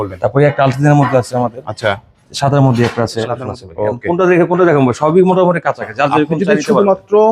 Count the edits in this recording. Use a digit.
1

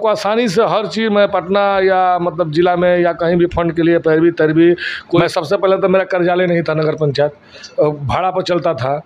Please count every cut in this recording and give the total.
1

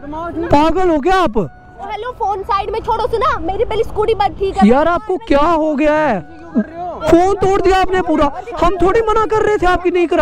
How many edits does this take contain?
2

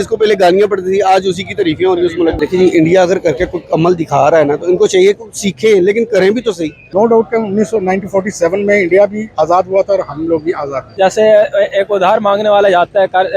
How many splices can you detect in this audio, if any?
3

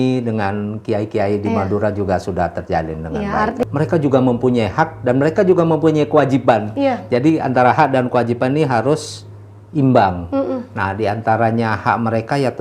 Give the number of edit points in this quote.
1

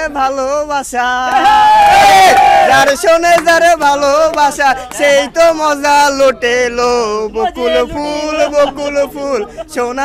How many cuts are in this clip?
0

